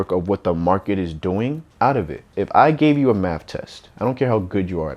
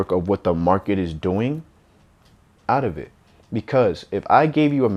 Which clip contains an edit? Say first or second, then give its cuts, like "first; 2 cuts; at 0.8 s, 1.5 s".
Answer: first; 2 cuts; at 1.7 s, 2.3 s